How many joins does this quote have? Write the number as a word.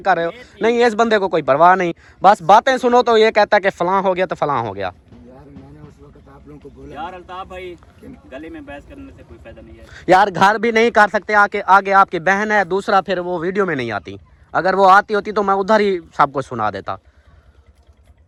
zero